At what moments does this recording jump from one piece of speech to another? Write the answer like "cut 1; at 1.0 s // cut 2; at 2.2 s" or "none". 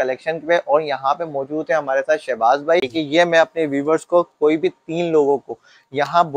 cut 1; at 2.9 s